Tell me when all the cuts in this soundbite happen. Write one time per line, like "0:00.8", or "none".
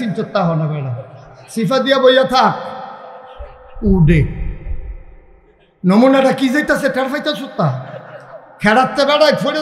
none